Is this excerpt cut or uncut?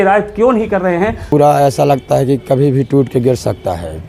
cut